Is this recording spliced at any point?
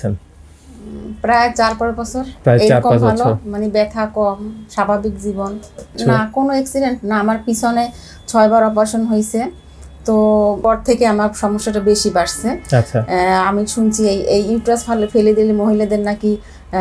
yes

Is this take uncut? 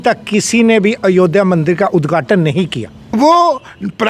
no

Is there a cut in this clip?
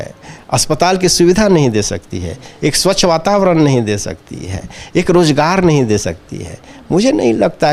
no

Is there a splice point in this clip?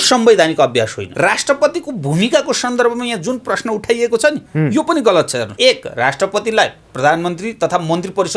yes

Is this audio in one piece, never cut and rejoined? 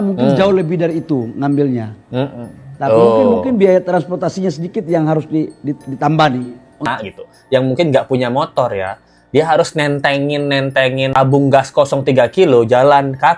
no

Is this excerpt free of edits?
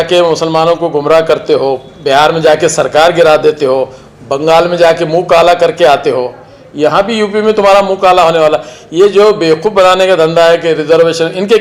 yes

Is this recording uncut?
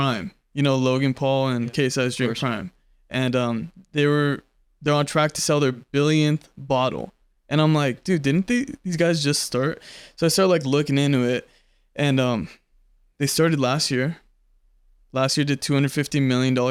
yes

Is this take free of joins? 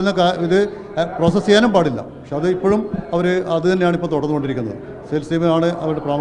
yes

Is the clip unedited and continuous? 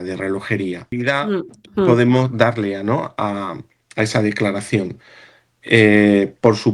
no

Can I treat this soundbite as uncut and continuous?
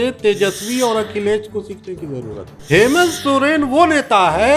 no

